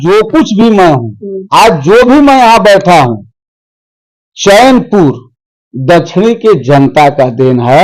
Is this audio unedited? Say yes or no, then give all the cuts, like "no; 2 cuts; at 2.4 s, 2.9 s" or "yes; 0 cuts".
yes; 0 cuts